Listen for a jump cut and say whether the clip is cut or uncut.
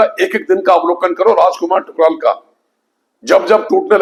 uncut